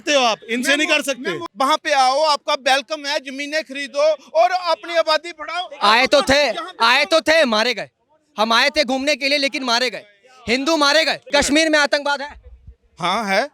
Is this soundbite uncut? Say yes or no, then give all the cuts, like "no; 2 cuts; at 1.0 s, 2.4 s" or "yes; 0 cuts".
no; 2 cuts; at 1.4 s, 11.2 s